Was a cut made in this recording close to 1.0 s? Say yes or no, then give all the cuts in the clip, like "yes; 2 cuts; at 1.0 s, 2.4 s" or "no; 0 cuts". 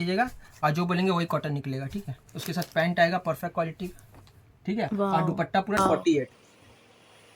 no; 1 cut; at 5.8 s